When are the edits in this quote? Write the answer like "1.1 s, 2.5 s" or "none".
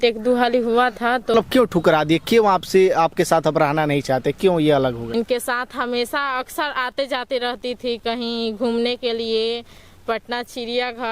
1.3 s, 5.0 s